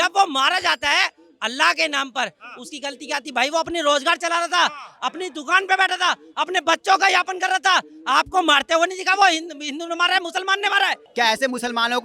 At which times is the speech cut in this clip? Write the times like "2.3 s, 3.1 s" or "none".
11.0 s